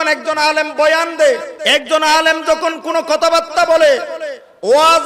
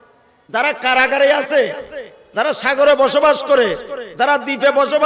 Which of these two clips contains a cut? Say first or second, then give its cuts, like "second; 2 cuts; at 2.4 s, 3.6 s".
first; 1 cut; at 1.5 s